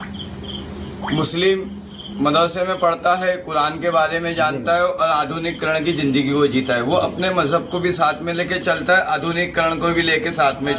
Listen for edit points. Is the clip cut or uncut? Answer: uncut